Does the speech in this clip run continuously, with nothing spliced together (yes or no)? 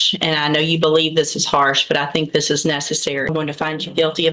no